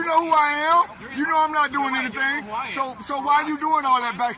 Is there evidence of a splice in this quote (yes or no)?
no